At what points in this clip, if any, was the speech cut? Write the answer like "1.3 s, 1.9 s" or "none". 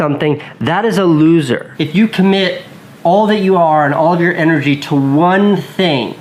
1.7 s